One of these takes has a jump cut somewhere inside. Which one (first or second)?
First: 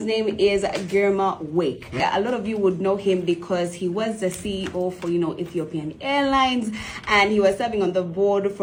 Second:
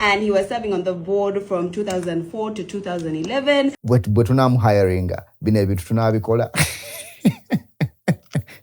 second